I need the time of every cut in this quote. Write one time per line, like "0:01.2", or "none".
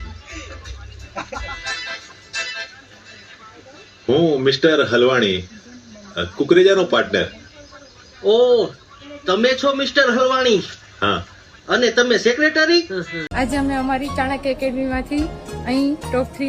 0:13.2